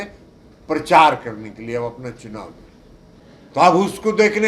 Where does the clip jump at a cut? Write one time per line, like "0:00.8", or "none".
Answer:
0:03.0